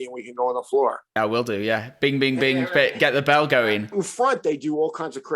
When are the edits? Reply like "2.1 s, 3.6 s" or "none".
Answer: 3.9 s